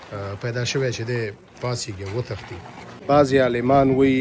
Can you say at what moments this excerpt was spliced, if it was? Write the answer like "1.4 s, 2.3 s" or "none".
2.9 s